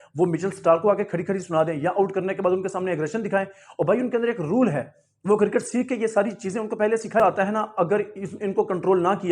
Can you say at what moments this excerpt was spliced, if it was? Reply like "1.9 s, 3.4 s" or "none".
7.2 s